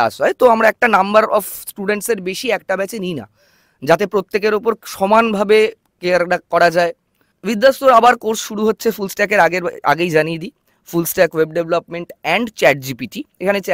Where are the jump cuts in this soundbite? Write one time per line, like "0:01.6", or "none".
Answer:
0:07.3